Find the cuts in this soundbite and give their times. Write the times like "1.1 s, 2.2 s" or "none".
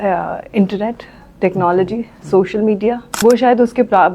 3.1 s